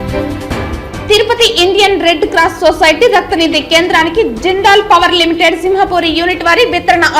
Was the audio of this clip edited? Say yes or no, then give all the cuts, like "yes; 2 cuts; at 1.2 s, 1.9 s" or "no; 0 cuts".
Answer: yes; 1 cut; at 0.9 s